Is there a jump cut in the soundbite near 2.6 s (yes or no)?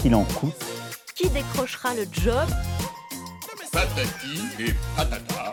no